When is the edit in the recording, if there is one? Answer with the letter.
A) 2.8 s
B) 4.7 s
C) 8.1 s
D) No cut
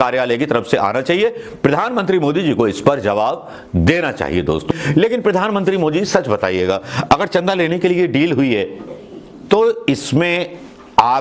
B